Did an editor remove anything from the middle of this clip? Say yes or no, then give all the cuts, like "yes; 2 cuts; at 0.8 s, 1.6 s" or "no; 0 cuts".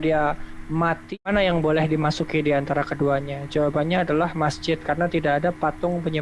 yes; 1 cut; at 1.1 s